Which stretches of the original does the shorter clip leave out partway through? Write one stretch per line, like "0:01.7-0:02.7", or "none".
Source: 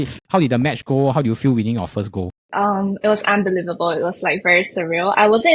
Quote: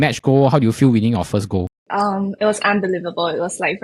none